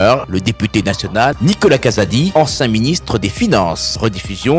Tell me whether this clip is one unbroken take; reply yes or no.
yes